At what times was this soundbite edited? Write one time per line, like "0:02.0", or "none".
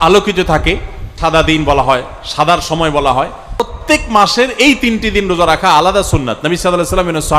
0:01.0
0:03.8